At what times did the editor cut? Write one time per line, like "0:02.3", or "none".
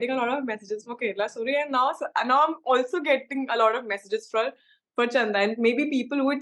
none